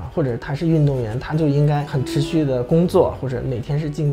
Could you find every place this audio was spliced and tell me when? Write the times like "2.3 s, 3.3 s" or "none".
1.9 s